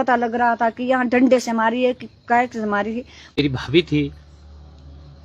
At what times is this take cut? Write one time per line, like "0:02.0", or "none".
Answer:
0:03.4